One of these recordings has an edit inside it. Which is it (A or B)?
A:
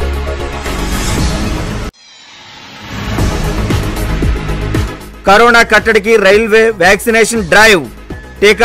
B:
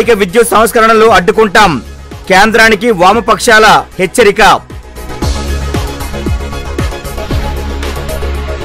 A